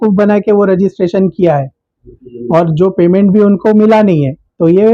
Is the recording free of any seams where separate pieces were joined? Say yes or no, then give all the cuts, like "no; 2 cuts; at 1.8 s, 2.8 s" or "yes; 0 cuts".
yes; 0 cuts